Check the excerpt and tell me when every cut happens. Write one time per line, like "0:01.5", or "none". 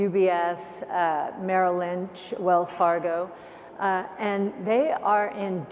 none

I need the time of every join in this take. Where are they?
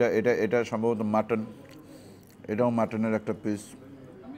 none

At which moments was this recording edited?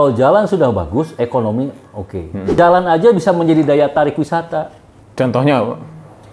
0:02.5

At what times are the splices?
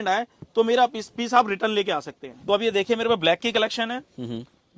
0:02.3

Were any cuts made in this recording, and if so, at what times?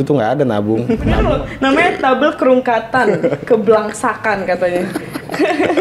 0:01.3

